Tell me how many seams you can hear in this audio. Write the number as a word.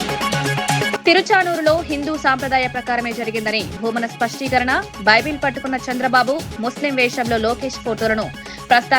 one